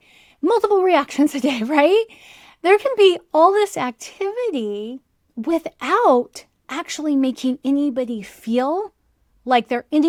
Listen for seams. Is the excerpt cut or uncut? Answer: uncut